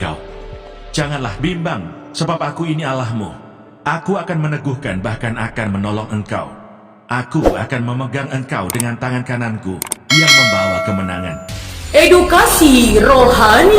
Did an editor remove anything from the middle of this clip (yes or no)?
no